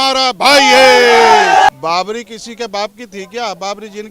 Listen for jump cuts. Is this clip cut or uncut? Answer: cut